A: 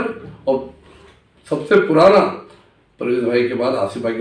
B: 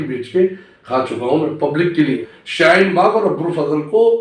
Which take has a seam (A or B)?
B